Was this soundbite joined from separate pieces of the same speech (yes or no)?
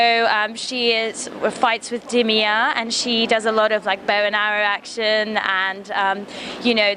yes